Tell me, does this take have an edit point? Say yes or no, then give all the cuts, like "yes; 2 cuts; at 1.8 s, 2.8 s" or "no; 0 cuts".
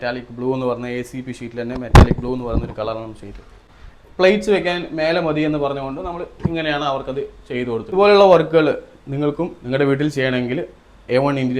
yes; 2 cuts; at 3.6 s, 7.9 s